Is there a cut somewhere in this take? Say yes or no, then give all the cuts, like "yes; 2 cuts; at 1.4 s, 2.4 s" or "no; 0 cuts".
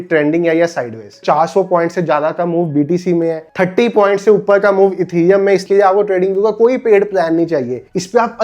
yes; 3 cuts; at 1.2 s, 3.4 s, 5.6 s